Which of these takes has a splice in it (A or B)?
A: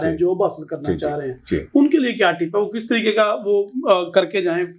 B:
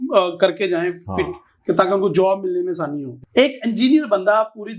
B